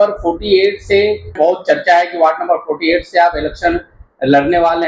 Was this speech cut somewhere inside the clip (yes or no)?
yes